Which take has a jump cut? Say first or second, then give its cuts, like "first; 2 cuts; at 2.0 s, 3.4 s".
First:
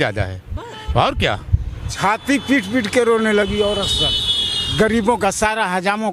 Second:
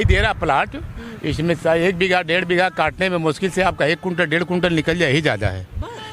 first; 1 cut; at 1.9 s